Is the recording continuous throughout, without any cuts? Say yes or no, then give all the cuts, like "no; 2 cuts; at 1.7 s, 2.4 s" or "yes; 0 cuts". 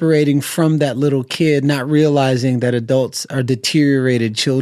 yes; 0 cuts